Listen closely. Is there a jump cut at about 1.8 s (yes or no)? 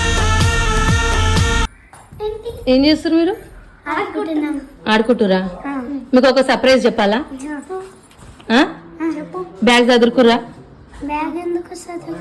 yes